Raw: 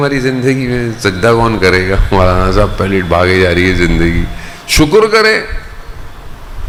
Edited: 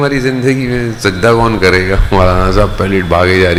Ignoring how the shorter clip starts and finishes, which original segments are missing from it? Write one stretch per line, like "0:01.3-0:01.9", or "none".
none

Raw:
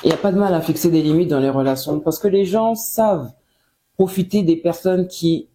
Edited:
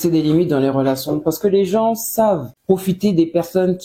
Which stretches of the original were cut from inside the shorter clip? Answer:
0:03.3-0:03.8

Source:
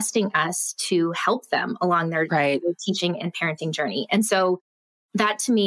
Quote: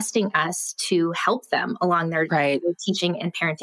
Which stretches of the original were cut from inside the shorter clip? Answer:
none

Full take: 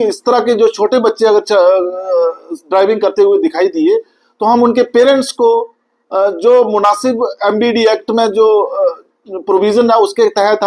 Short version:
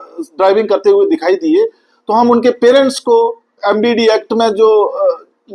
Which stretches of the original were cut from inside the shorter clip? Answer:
0:05.8-0:07.3

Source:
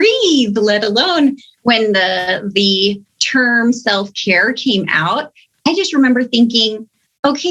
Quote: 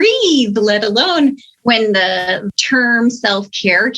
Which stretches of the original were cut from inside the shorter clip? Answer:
0:02.5-0:03.1

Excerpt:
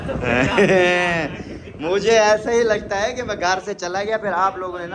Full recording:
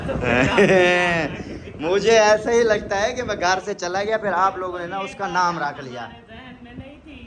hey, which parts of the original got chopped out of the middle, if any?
none

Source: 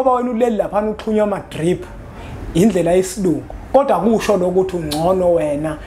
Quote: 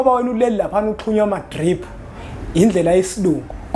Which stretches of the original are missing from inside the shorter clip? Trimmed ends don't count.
none

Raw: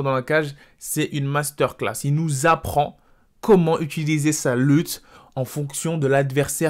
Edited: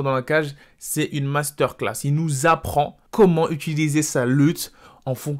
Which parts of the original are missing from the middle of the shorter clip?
0:03.0-0:03.3

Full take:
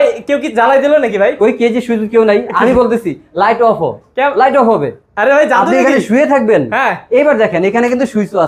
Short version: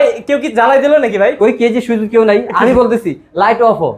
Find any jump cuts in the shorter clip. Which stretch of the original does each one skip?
none

